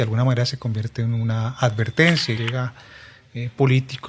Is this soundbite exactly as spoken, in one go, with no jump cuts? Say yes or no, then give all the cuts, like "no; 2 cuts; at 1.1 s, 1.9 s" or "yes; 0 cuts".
no; 1 cut; at 2.4 s